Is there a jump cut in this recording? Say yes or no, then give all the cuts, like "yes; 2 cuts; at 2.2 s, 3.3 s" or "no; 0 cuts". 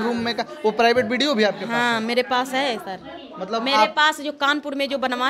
no; 0 cuts